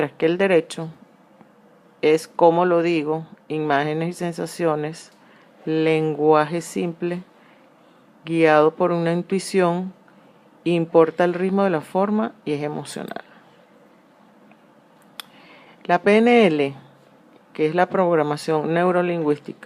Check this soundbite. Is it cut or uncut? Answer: uncut